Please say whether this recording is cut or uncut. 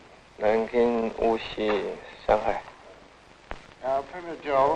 cut